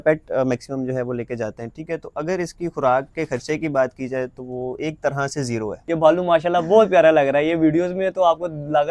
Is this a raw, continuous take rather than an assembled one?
no; 1 cut; at 5.8 s

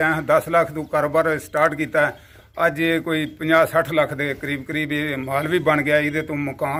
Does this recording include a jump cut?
no; 0 cuts

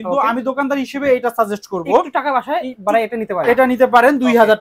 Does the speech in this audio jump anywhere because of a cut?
no; 0 cuts

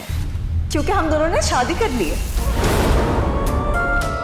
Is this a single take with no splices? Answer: yes; 0 cuts

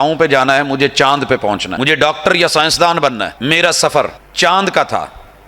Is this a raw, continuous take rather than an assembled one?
no; 3 cuts; at 1.7 s, 3.3 s, 4.2 s

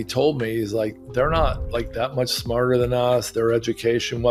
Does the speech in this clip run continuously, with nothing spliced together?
yes; 0 cuts

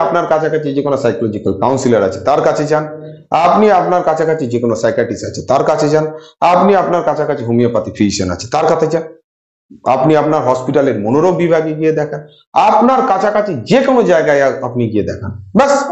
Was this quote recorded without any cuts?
yes; 0 cuts

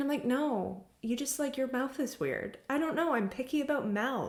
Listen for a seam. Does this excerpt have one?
no; 0 cuts

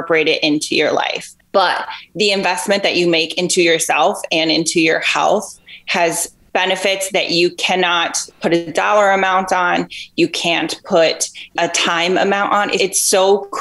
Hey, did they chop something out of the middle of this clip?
yes; 2 cuts; at 11.4 s, 12.7 s

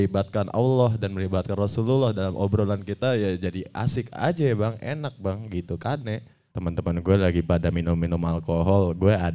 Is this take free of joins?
no; 1 cut; at 6.5 s

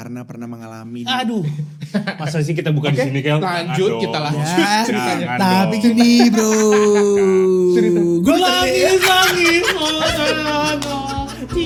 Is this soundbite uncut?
yes; 0 cuts

